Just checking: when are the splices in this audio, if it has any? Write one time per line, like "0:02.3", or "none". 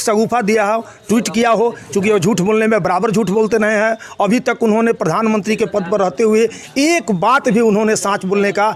none